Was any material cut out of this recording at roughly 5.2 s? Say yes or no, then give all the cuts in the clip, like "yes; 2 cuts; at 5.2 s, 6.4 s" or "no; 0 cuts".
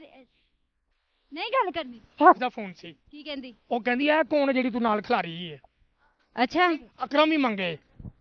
no; 2 cuts; at 2.4 s, 6.9 s